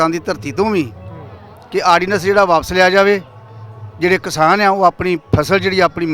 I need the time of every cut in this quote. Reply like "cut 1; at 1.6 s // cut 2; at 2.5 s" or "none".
none